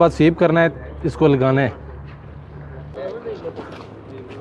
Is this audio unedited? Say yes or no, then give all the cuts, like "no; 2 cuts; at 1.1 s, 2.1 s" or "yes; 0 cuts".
yes; 0 cuts